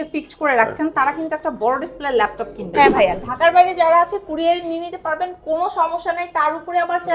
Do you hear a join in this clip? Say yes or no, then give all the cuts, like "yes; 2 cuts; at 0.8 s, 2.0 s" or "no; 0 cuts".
yes; 1 cut; at 2.7 s